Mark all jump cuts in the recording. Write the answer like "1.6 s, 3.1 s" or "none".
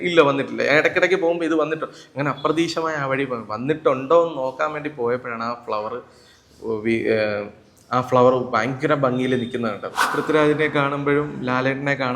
10.2 s